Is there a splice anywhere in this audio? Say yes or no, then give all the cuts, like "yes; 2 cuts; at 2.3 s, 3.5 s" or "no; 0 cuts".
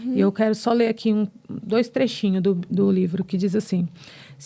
no; 0 cuts